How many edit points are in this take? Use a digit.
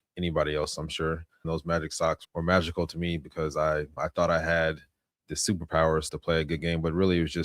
1